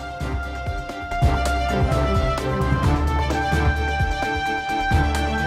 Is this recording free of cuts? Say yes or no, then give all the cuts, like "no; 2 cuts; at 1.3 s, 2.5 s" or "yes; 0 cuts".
yes; 0 cuts